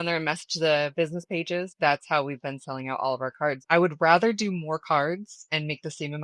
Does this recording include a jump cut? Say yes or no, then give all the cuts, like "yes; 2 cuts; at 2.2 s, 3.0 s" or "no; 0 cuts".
yes; 2 cuts; at 1.7 s, 3.6 s